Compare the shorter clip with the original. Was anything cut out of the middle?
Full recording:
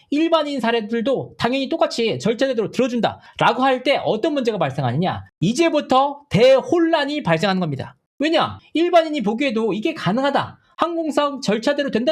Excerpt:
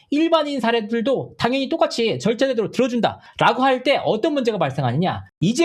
no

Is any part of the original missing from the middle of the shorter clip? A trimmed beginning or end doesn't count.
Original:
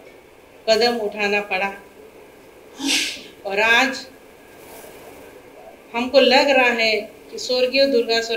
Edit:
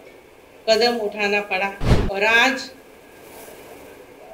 yes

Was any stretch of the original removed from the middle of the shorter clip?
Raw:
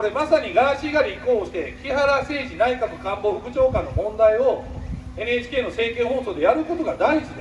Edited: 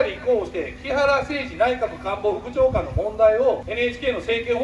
yes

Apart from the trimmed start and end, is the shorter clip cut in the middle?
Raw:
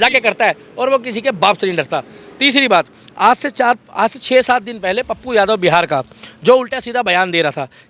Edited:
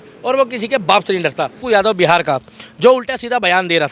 yes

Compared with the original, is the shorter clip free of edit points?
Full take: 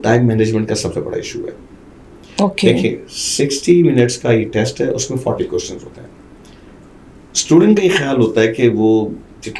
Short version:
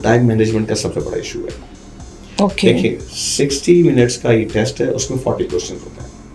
yes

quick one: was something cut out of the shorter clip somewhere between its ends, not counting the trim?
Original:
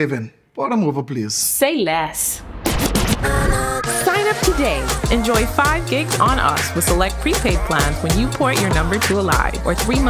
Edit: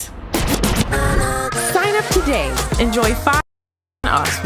no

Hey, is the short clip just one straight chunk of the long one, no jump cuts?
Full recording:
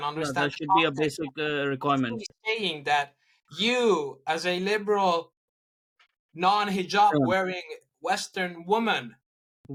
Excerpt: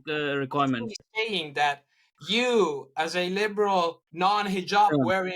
no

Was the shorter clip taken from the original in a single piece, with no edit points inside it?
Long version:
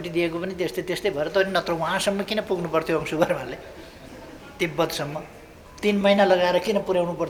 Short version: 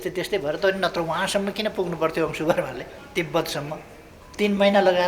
no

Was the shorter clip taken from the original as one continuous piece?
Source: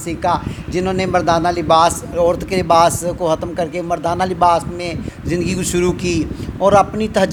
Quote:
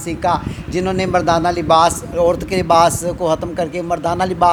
yes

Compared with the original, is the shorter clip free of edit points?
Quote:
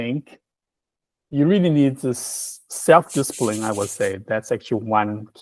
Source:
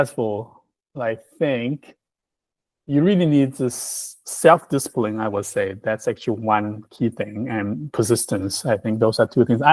yes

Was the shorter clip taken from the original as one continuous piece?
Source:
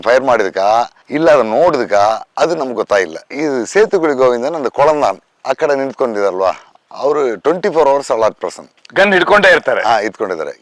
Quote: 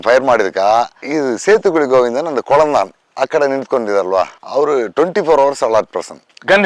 no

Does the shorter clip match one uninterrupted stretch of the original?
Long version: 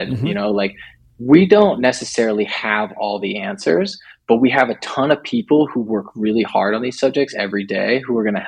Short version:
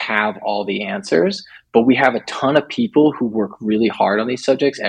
yes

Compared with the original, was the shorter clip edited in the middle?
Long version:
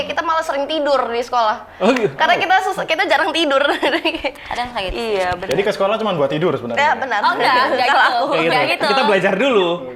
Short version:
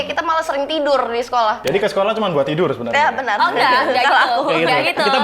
yes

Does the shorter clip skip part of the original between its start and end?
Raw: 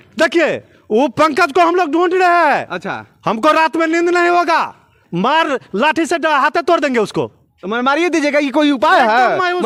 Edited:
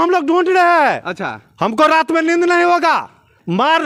no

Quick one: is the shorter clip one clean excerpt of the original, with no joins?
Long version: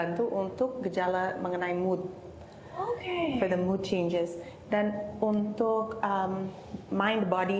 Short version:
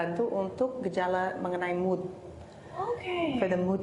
yes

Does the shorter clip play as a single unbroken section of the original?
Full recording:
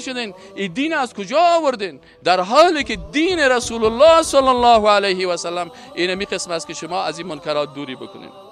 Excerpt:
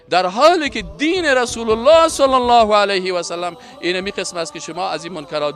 yes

